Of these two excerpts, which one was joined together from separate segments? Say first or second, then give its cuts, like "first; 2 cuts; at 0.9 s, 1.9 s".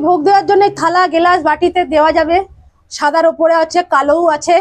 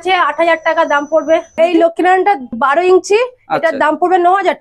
second; 2 cuts; at 1.5 s, 2.6 s